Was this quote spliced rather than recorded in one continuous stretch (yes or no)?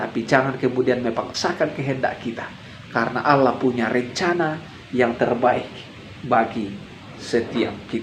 yes